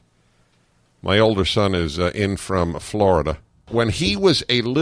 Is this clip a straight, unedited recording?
no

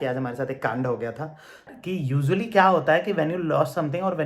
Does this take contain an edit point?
yes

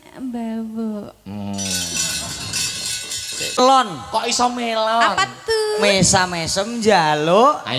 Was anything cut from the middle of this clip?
yes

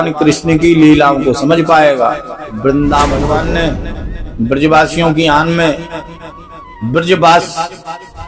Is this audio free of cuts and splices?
no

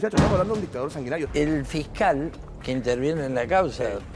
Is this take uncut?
no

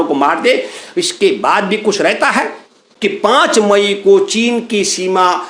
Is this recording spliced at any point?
no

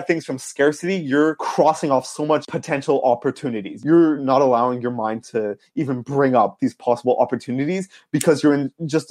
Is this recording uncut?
no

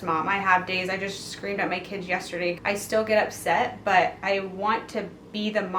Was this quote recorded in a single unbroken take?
no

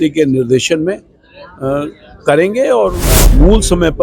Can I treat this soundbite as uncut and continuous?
no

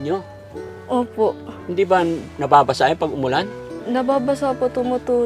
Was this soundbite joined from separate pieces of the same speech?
yes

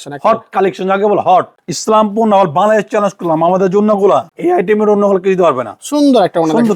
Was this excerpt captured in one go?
no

